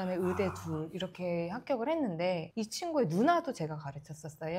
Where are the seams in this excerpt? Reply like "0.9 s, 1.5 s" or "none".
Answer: none